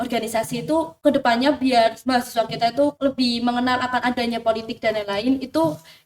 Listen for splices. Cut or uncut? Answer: cut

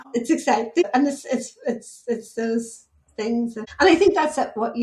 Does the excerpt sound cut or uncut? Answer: cut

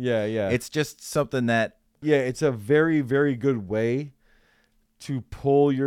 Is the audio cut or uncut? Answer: cut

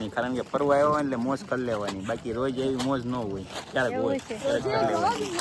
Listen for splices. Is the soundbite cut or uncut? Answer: uncut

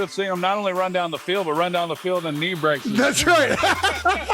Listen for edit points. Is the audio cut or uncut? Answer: cut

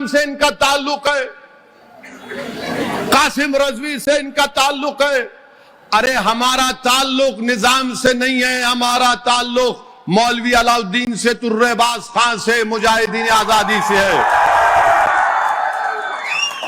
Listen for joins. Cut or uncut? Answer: uncut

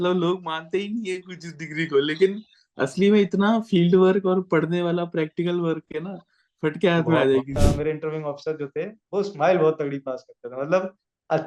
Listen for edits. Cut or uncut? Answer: cut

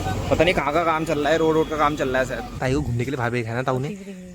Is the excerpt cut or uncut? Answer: cut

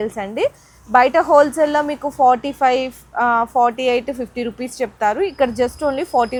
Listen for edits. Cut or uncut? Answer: uncut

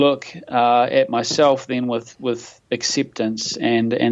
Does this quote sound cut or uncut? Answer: uncut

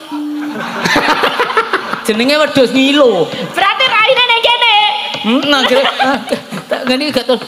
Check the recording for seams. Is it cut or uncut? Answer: uncut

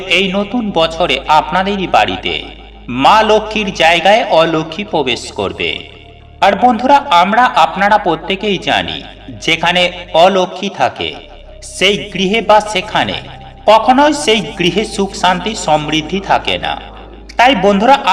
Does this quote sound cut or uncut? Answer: uncut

